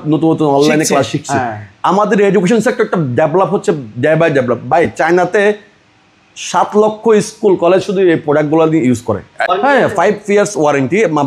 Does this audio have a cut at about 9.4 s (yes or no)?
yes